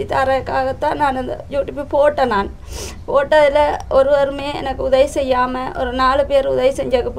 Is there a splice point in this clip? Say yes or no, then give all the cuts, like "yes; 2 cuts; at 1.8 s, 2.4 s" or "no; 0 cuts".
no; 0 cuts